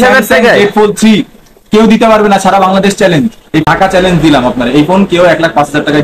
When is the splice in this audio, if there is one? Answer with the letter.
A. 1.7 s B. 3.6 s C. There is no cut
B